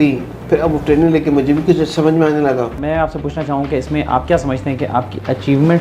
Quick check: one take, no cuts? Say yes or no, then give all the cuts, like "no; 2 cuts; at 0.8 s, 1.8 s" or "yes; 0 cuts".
no; 1 cut; at 2.8 s